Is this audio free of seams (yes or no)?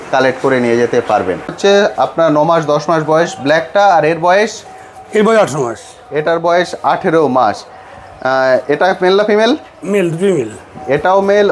no